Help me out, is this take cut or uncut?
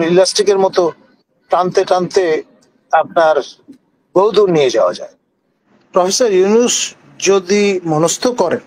uncut